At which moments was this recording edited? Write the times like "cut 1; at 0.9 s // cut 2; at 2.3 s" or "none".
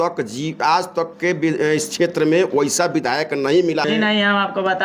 cut 1; at 3.9 s